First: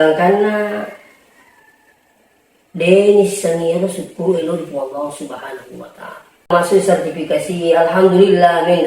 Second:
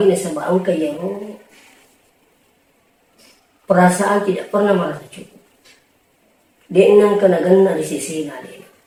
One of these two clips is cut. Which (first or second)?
first